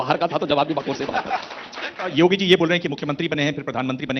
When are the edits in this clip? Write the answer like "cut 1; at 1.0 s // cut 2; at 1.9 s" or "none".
cut 1; at 2.1 s